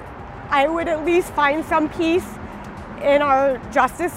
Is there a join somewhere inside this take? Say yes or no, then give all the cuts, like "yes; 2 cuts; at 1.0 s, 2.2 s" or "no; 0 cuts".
no; 0 cuts